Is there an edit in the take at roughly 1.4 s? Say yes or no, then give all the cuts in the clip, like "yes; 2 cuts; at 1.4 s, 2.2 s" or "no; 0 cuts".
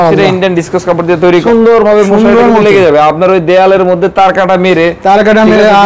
yes; 1 cut; at 1.4 s